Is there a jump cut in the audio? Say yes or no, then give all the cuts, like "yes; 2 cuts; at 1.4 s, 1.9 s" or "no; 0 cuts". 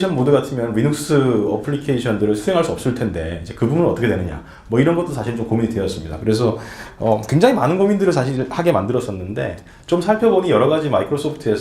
yes; 1 cut; at 4.4 s